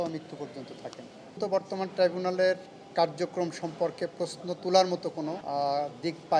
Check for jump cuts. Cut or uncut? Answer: cut